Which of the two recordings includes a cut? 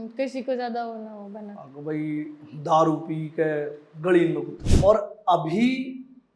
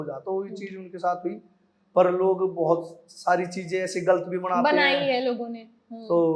first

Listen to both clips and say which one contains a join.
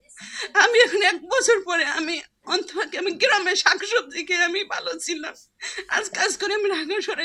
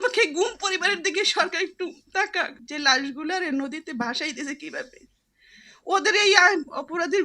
second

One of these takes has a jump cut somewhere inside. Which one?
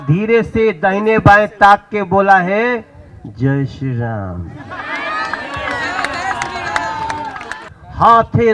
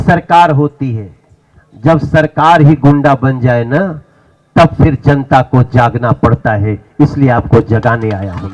first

